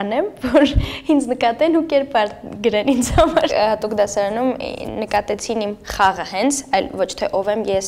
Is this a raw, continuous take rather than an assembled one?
no; 1 cut; at 3.6 s

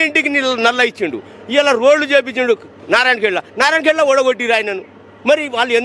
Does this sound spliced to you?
no; 0 cuts

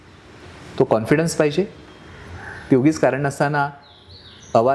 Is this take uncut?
yes; 0 cuts

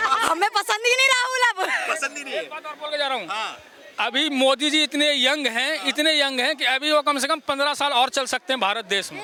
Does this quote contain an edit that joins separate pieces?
no; 0 cuts

